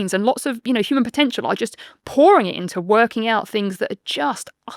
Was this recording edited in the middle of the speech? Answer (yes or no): no